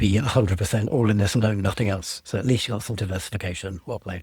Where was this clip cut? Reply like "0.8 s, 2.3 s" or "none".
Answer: none